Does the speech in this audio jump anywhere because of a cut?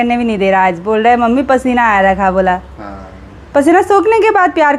no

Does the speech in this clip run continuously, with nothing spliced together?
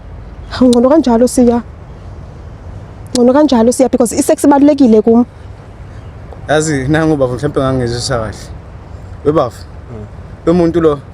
yes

